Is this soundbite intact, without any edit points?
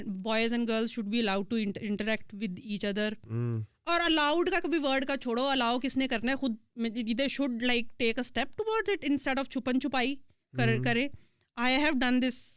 yes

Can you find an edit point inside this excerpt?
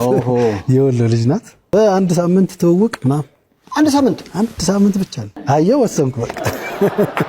yes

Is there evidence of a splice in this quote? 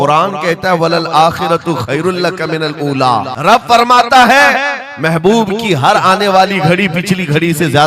yes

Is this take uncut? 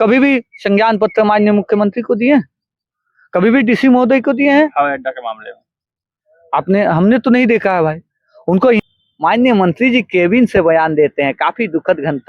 no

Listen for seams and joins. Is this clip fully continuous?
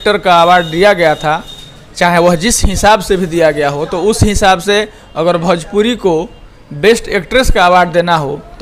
yes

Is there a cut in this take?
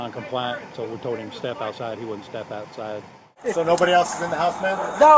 yes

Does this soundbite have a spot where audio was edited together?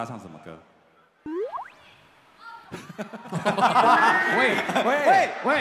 no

